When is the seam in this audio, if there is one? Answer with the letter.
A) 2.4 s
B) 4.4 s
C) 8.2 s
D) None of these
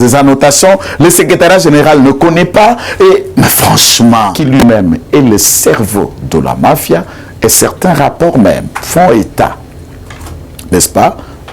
B